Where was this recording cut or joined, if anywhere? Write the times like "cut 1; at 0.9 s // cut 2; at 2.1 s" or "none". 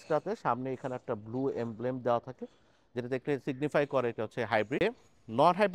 cut 1; at 4.8 s

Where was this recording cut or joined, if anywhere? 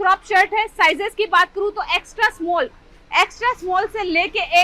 none

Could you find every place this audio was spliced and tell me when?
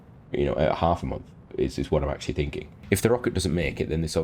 cut 1; at 2.7 s

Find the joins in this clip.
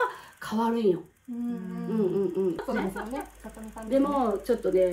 cut 1; at 2.6 s

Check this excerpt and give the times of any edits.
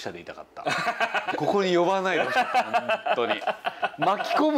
cut 1; at 1.3 s

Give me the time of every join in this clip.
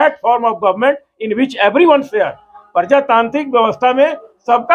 none

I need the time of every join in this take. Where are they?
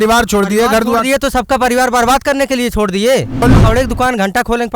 cut 1; at 3.4 s

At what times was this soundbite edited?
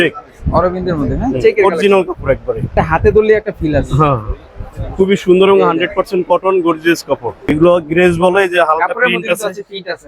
cut 1; at 2.7 s // cut 2; at 7.3 s

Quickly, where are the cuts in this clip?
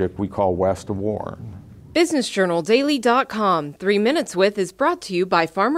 cut 1; at 1.7 s

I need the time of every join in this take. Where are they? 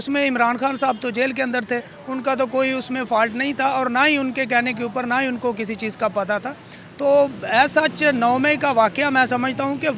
none

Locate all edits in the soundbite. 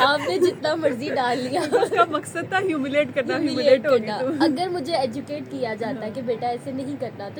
none

